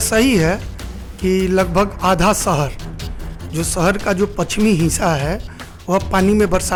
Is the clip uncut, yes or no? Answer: yes